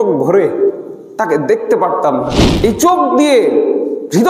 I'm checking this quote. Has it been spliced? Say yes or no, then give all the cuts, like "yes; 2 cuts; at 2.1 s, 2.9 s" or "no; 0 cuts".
yes; 1 cut; at 2.4 s